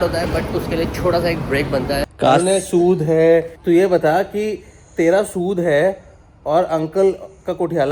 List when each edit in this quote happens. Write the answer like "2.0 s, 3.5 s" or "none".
2.0 s, 3.5 s